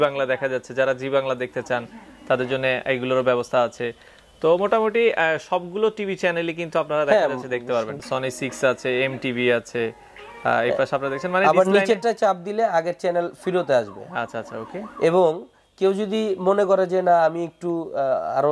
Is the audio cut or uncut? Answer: cut